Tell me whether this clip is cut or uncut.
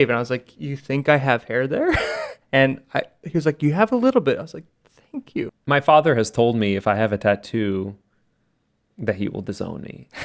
cut